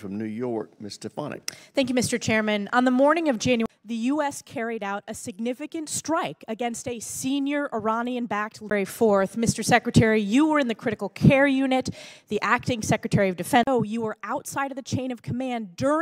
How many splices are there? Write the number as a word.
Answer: zero